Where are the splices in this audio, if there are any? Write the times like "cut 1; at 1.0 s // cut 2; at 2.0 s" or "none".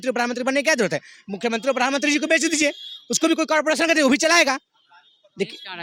none